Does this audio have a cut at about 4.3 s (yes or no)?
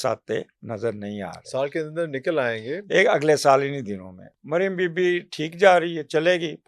yes